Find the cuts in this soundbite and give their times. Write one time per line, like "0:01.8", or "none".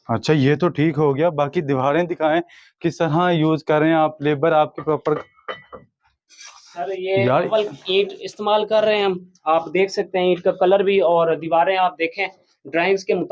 none